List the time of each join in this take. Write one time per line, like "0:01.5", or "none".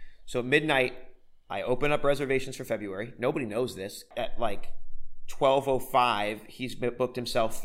0:04.1